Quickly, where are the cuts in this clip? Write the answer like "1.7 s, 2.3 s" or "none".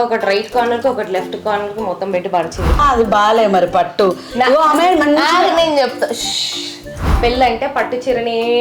2.8 s, 7.2 s